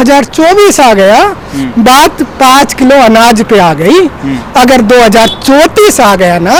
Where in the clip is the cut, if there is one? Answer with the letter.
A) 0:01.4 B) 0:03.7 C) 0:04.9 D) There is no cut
D